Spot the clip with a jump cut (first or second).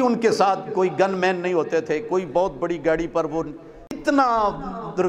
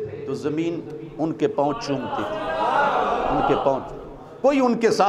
first